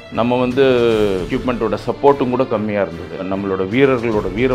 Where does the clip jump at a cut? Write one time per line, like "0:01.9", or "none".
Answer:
0:01.3
0:03.3